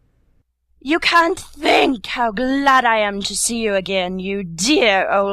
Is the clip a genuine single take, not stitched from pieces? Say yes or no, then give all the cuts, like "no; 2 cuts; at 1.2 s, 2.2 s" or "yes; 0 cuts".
no; 1 cut; at 3.3 s